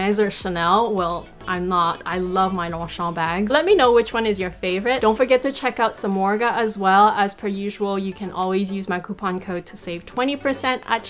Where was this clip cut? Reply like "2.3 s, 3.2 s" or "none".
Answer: none